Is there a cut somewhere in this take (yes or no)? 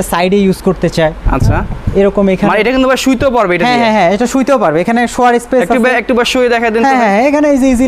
no